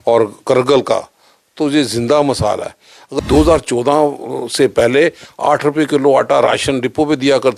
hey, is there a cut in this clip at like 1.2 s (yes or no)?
no